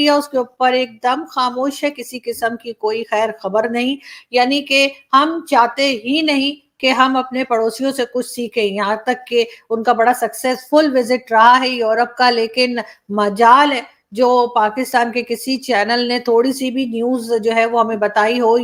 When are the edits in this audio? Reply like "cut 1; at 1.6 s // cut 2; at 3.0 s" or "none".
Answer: none